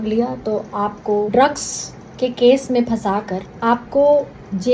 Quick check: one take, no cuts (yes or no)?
no